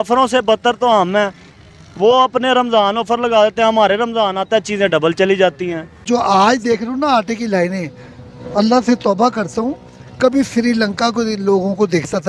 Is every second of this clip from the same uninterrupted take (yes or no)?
no